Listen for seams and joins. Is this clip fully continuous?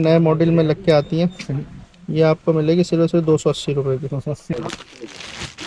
yes; 0 cuts

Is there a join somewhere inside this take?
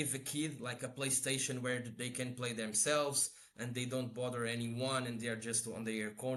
no; 0 cuts

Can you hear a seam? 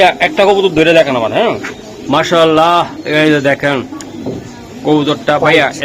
no; 0 cuts

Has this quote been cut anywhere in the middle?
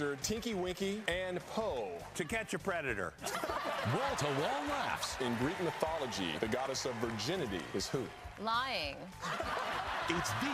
no; 0 cuts

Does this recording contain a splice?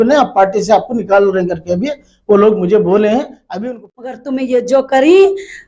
yes; 1 cut; at 3.6 s

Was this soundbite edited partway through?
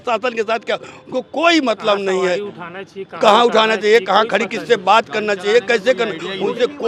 no; 0 cuts

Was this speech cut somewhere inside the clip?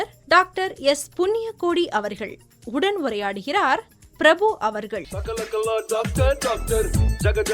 yes; 1 cut; at 5.1 s

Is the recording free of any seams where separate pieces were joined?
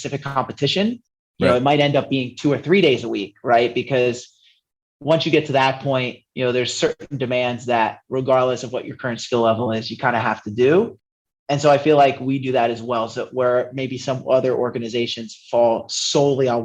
yes; 0 cuts

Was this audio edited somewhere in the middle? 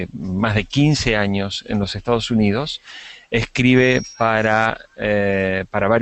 no; 0 cuts

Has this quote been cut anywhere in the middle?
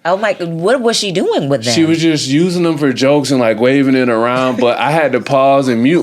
no; 0 cuts

